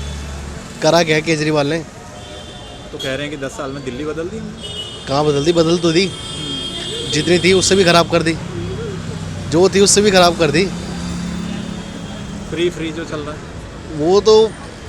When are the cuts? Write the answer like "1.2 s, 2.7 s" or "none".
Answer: none